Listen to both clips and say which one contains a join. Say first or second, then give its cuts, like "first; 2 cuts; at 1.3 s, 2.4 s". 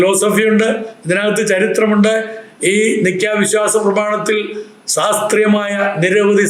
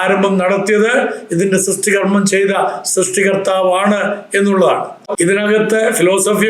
second; 1 cut; at 5.1 s